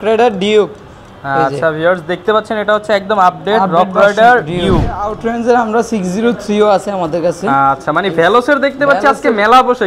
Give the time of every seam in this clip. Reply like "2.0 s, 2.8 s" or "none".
5.2 s